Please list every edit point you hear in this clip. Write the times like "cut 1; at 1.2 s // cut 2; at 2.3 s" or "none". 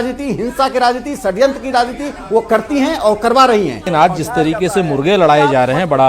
cut 1; at 3.9 s